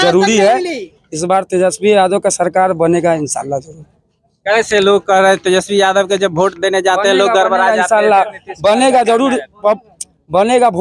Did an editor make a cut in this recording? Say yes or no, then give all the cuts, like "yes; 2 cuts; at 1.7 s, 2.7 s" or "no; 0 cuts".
no; 0 cuts